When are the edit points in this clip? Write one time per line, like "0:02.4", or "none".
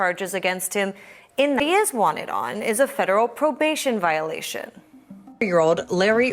0:01.6
0:05.4

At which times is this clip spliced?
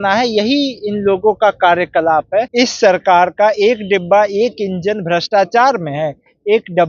0:02.5

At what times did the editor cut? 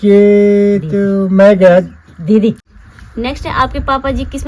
0:02.7

